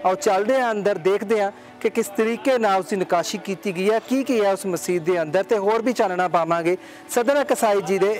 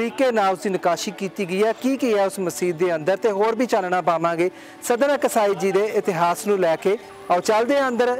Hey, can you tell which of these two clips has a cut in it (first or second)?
second